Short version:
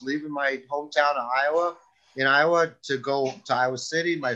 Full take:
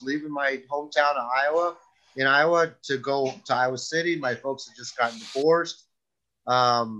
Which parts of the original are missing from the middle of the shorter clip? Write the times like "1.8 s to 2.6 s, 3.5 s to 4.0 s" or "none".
none